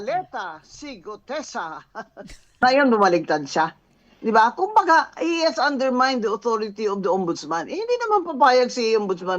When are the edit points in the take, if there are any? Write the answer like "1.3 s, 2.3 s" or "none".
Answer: 2.6 s